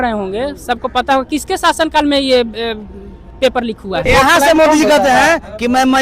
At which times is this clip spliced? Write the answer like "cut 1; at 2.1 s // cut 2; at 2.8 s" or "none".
cut 1; at 4.0 s